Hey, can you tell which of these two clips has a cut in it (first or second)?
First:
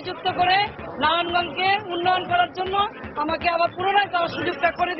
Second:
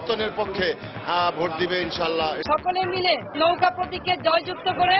second